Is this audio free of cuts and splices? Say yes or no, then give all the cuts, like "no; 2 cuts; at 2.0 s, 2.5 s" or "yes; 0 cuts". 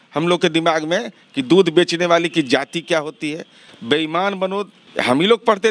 no; 1 cut; at 4.8 s